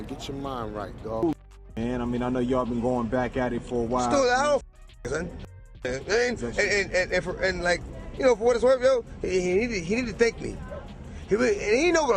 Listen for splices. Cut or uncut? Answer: cut